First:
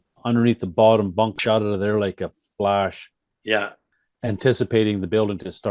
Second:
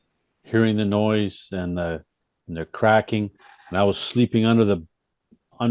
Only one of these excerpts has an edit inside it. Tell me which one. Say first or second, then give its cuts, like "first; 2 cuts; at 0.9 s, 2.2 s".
first; 2 cuts; at 1.4 s, 3.9 s